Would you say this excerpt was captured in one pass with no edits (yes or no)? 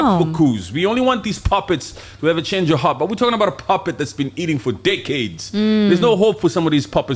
yes